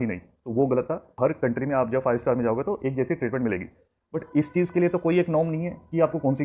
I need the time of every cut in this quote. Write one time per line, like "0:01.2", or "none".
0:01.1